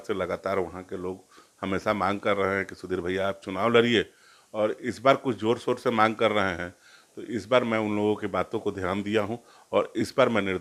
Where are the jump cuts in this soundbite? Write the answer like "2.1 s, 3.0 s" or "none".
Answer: none